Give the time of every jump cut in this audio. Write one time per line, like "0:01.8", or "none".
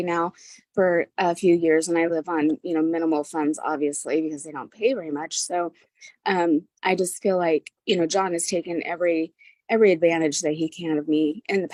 none